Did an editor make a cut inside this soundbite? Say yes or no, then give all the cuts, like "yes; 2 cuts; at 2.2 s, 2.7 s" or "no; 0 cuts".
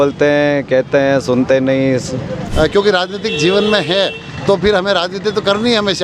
yes; 1 cut; at 2.4 s